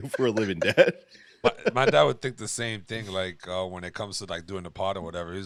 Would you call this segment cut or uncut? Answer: uncut